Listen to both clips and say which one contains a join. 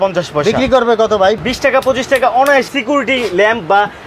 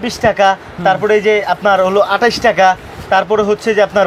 first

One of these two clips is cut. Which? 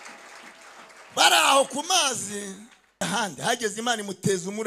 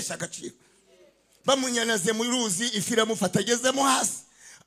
first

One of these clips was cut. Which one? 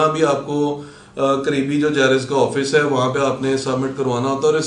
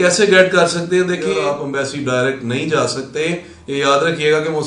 second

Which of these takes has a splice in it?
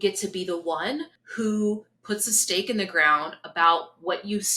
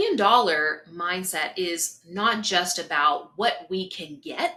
first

